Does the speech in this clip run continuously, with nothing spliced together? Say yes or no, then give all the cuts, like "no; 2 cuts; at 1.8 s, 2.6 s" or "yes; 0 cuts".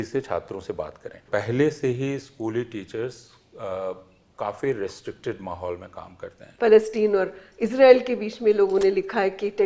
no; 2 cuts; at 1.3 s, 6.5 s